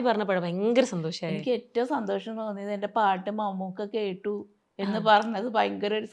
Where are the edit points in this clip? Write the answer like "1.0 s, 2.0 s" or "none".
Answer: none